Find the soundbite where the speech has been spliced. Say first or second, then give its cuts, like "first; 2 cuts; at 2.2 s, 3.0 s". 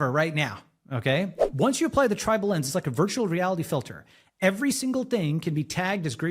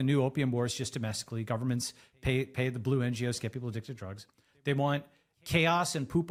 first; 1 cut; at 1.4 s